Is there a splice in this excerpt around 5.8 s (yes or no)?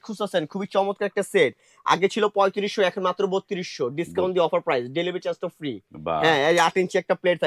no